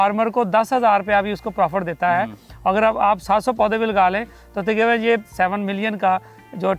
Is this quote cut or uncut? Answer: cut